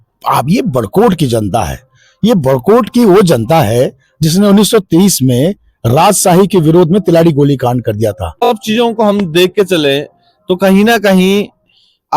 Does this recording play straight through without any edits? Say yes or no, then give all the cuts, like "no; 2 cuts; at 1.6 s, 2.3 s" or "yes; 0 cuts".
no; 1 cut; at 8.3 s